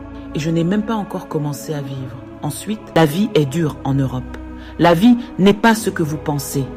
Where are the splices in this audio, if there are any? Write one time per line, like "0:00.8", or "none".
0:02.9